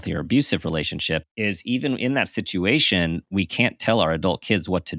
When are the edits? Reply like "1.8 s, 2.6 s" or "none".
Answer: 1.2 s